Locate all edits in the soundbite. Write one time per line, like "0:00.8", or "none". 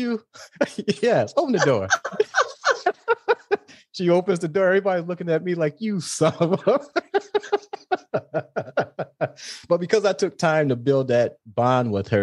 none